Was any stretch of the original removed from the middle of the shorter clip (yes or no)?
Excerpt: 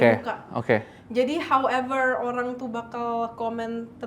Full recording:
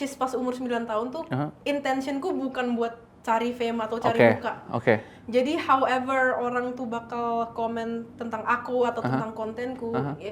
no